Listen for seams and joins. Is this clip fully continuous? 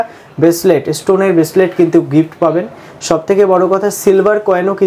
yes; 0 cuts

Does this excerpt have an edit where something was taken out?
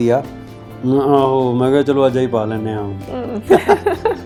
no; 0 cuts

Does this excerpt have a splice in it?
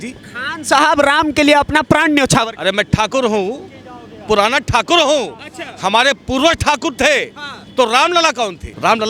no; 0 cuts

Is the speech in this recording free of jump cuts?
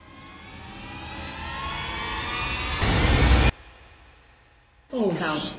no; 1 cut; at 3.5 s

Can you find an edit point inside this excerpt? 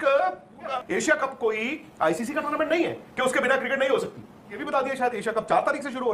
yes; 2 cuts; at 0.7 s, 4.6 s

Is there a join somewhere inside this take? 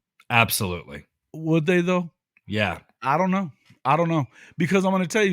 no; 0 cuts

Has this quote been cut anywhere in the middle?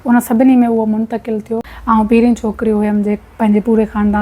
yes; 1 cut; at 1.7 s

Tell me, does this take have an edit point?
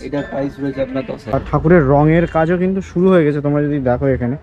yes; 1 cut; at 1.4 s

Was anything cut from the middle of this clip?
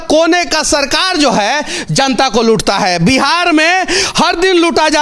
no; 0 cuts

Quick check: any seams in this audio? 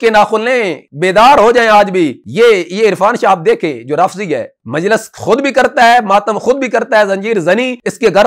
no; 0 cuts

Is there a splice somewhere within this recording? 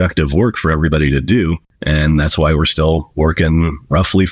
yes; 1 cut; at 1.7 s

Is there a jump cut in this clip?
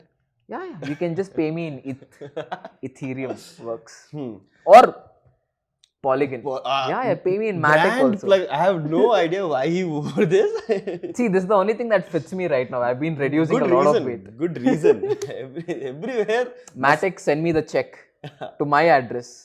no; 0 cuts

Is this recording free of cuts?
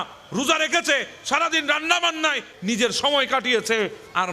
no; 1 cut; at 2.5 s

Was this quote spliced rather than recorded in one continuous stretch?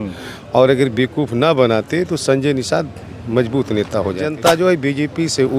yes; 1 cut; at 4.3 s

